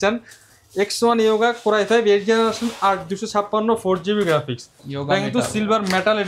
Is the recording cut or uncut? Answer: uncut